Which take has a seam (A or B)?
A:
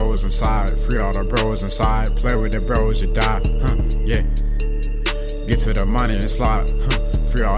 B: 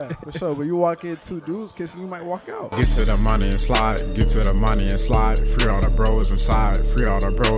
B